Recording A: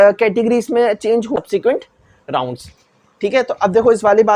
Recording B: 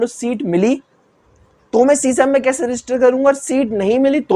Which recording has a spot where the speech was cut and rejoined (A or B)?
A